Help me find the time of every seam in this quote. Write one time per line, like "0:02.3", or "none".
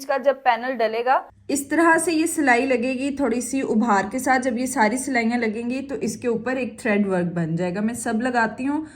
0:01.3